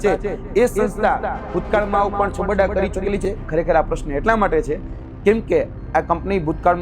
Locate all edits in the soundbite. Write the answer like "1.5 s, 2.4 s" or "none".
3.2 s